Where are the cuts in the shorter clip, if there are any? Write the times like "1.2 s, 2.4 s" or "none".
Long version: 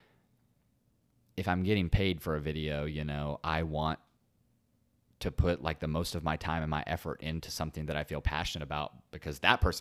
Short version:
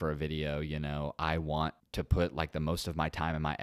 1.8 s

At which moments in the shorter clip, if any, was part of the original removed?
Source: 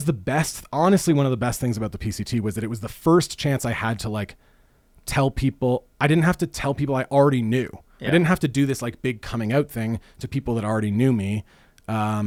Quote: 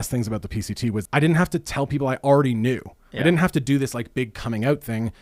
1.0 s

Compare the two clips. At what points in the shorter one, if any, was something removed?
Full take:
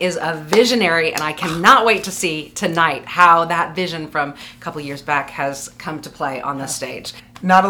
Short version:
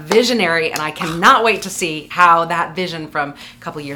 2.0 s

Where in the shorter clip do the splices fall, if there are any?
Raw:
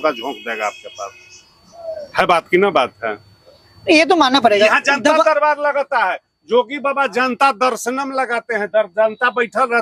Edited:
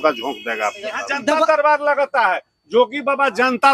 1.1 s

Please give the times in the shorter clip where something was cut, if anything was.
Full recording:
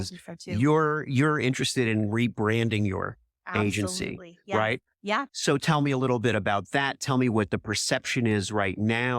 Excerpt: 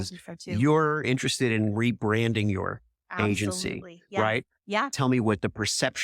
1.0 s, 4.9 s

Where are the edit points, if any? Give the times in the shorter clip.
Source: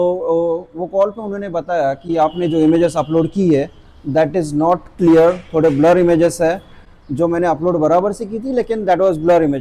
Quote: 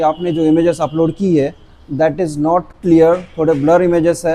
none

